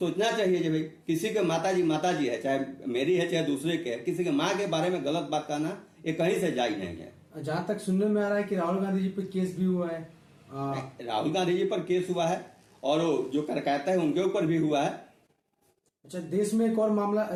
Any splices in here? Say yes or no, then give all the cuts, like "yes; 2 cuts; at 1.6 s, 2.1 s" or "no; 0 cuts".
no; 0 cuts